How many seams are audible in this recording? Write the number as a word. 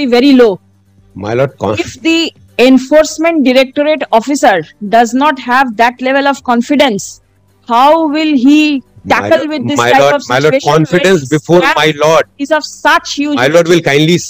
zero